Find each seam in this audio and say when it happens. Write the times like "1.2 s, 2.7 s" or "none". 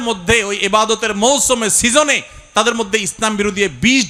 none